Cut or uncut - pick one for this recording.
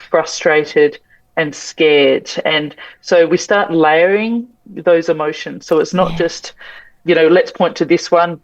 uncut